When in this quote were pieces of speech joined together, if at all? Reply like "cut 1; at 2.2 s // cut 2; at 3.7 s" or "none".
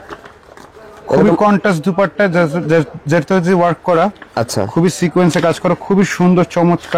none